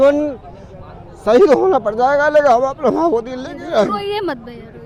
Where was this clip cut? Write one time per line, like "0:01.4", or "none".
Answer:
none